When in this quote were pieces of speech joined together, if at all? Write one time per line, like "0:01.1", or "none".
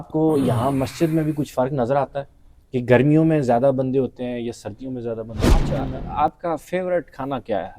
0:05.7

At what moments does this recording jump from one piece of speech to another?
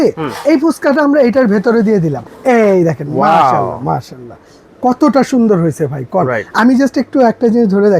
0:02.3

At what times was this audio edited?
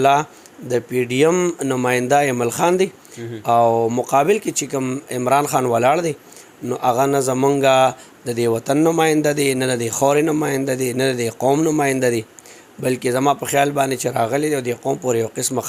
none

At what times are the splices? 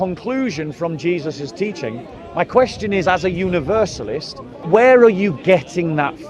0:04.6

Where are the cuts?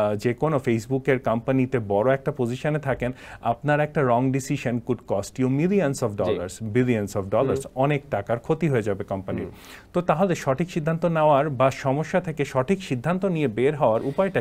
none

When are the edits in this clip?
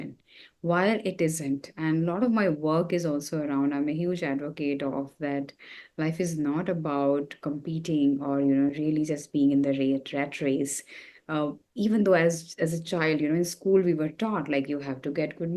none

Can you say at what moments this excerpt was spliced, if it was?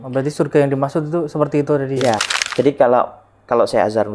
0:02.2

